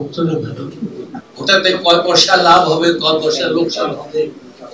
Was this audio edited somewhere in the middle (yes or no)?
yes